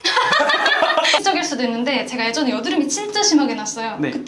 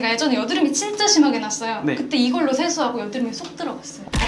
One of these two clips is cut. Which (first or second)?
first